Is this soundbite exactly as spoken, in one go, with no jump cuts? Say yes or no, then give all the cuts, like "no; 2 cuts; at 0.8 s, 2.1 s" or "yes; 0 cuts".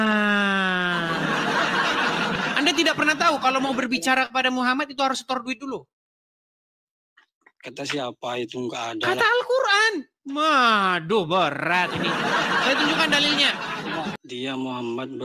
no; 2 cuts; at 2.4 s, 14.2 s